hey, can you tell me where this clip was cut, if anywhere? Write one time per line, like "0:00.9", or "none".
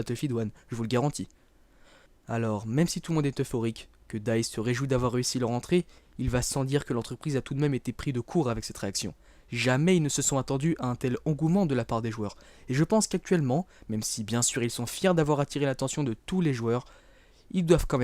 0:13.5